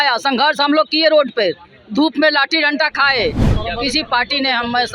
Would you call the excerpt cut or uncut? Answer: cut